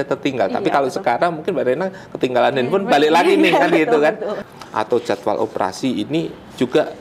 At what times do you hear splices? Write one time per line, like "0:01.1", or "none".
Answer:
0:04.4